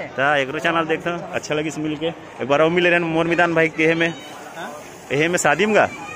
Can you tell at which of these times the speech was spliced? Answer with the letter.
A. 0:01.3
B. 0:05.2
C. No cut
A